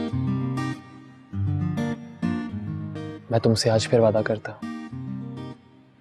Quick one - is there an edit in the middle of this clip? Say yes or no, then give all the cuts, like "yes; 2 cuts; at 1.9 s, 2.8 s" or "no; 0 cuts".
no; 0 cuts